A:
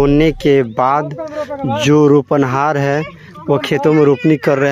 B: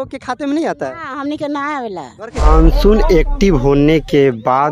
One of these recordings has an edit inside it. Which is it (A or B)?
B